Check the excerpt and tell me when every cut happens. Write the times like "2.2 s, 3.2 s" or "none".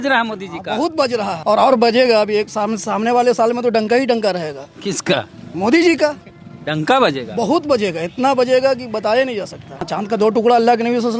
1.4 s, 9.9 s